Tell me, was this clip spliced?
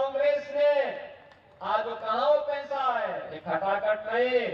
yes; 1 cut; at 3.3 s

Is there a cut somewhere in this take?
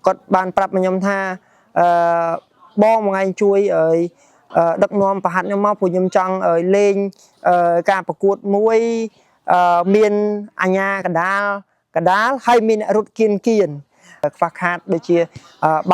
yes; 1 cut; at 14.3 s

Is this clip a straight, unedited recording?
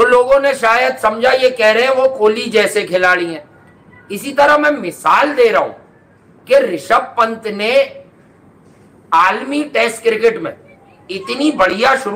yes; 0 cuts

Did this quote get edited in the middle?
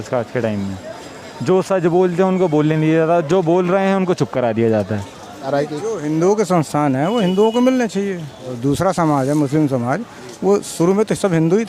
yes; 2 cuts; at 5.5 s, 8.5 s

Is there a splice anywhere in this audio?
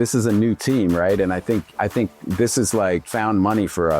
yes; 1 cut; at 3.1 s

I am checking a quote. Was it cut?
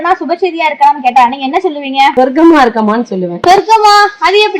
yes; 2 cuts; at 2.1 s, 3.3 s

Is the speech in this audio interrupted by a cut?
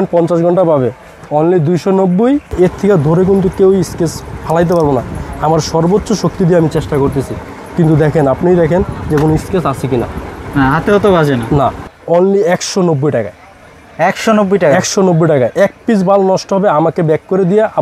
yes; 2 cuts; at 2.5 s, 11.8 s

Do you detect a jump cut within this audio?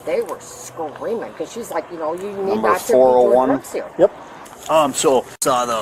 no; 0 cuts

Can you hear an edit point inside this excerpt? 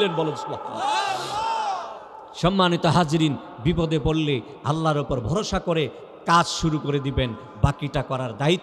no; 0 cuts

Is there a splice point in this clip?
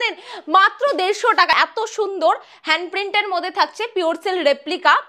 yes; 1 cut; at 1.6 s

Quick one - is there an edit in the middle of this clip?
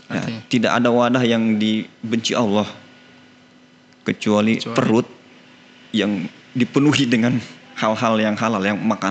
no; 0 cuts

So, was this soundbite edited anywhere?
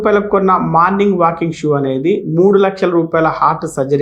no; 0 cuts

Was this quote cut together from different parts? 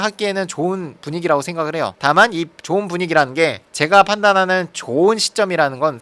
yes; 1 cut; at 3.7 s

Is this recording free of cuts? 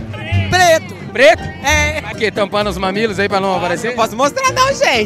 no; 1 cut; at 2.1 s

